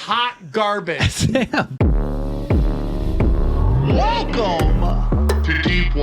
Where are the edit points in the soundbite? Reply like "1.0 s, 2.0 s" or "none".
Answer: 1.7 s

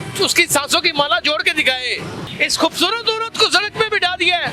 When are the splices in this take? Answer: 2.3 s

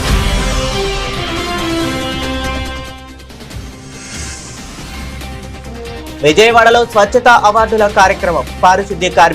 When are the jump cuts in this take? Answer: 4.7 s, 5.8 s

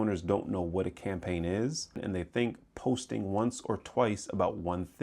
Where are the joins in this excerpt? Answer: 2.0 s

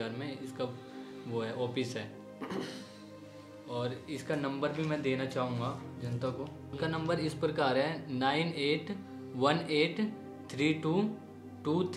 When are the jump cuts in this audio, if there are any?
none

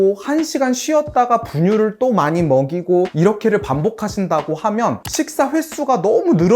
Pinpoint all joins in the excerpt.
3.1 s

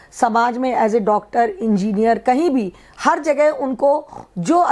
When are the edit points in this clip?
none

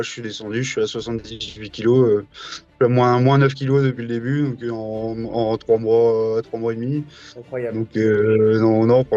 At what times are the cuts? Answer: none

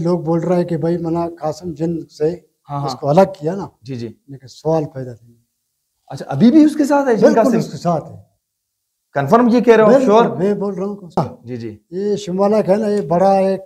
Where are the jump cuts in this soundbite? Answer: 11.0 s

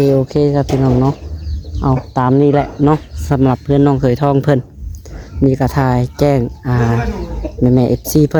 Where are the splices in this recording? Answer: none

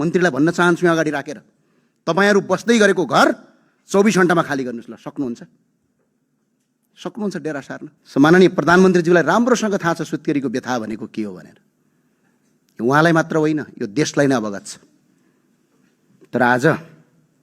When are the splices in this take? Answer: 7.9 s

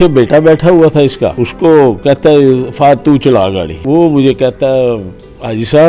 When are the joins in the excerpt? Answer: 1.4 s, 3.7 s

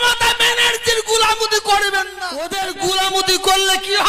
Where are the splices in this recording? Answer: 2.1 s

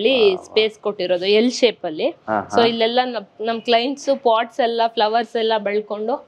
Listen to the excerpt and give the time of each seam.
none

